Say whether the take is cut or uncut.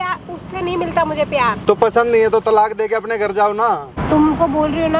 cut